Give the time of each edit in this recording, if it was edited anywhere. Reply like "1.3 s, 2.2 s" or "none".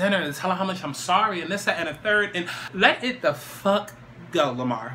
2.6 s